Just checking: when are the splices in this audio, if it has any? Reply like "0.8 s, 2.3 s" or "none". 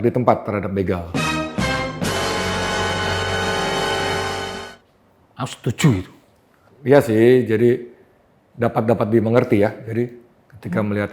none